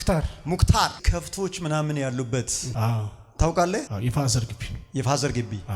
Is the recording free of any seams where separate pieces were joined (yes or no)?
no